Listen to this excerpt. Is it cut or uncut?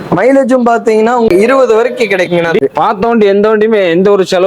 cut